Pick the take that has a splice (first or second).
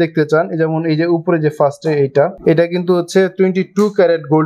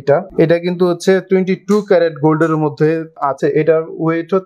second